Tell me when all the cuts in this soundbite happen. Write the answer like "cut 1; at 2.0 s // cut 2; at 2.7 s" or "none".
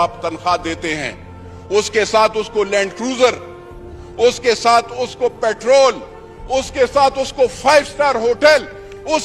none